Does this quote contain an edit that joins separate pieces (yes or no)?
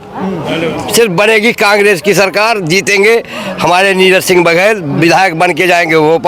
no